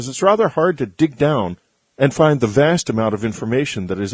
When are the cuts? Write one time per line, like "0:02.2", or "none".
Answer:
none